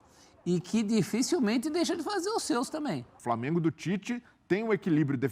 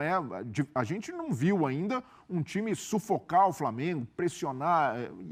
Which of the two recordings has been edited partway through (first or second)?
first